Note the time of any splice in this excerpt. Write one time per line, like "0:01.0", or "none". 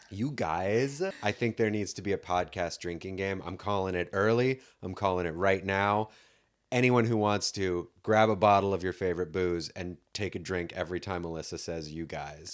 0:01.2